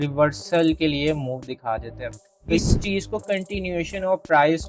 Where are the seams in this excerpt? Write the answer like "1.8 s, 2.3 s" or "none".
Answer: 2.6 s